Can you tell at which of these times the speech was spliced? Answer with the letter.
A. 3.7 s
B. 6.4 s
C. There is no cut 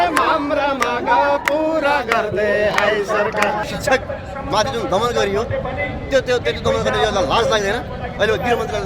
A